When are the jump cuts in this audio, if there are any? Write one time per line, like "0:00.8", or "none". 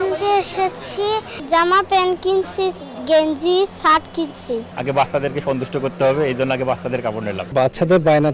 0:01.3
0:04.7
0:07.4